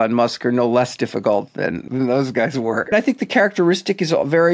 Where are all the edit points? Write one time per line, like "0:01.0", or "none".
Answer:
0:01.9
0:02.9